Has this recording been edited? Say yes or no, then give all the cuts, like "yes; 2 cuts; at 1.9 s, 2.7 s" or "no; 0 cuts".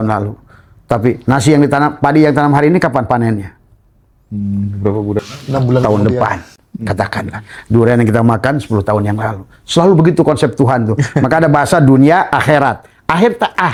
no; 0 cuts